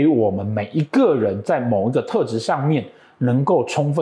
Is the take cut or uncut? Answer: uncut